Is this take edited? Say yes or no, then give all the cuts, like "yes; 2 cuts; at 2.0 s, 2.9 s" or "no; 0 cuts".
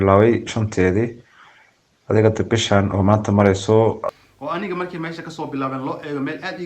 yes; 1 cut; at 4.0 s